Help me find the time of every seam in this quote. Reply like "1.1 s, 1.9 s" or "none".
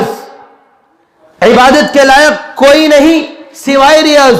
none